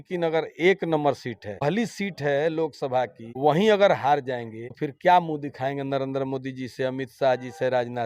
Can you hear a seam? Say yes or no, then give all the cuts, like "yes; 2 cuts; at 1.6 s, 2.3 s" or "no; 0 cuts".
yes; 1 cut; at 1.6 s